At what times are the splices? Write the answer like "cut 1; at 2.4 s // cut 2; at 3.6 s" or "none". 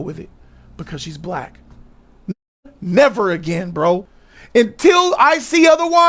cut 1; at 4.2 s